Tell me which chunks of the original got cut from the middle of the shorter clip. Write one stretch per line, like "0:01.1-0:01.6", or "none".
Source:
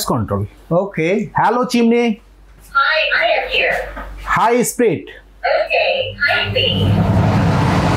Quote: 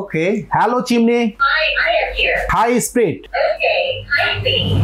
0:02.3-0:02.8
0:03.8-0:04.3
0:05.1-0:05.3